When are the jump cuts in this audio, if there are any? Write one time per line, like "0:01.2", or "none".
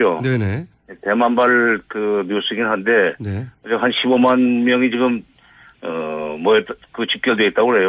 0:01.4